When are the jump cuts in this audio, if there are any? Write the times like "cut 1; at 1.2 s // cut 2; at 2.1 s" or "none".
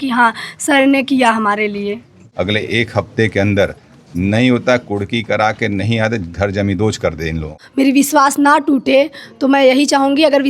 cut 1; at 2.2 s // cut 2; at 7.6 s